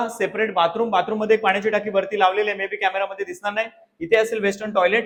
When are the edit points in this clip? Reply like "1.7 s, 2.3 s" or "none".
none